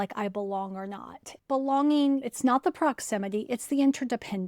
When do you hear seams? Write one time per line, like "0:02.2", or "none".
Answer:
0:01.3
0:02.3